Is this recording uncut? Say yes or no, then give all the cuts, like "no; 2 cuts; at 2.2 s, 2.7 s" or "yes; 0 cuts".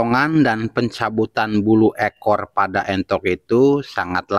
yes; 0 cuts